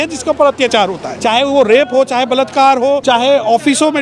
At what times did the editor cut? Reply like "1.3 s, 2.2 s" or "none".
1.1 s, 3.0 s